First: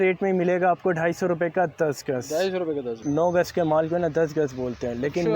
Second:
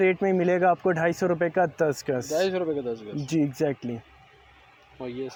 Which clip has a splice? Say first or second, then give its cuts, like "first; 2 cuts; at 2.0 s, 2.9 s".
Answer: first; 1 cut; at 3.0 s